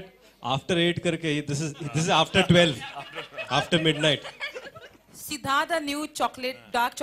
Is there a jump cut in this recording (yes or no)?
no